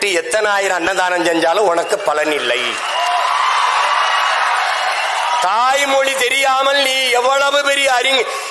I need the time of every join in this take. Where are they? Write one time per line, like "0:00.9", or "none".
none